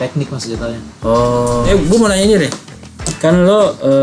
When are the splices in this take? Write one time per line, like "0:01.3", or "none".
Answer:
0:01.7